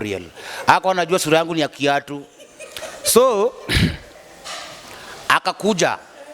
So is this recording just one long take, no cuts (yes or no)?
yes